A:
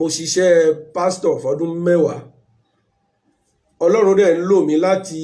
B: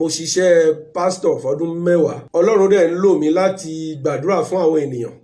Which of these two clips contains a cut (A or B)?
B